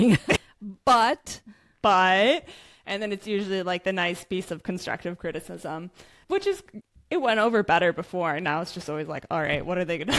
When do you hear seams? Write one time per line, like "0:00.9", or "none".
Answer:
none